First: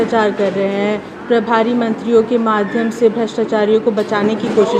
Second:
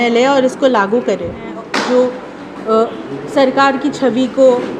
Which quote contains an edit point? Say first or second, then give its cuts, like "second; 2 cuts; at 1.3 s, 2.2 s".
second; 1 cut; at 1.6 s